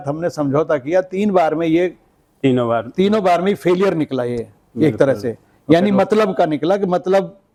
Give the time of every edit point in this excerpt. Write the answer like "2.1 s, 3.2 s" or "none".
none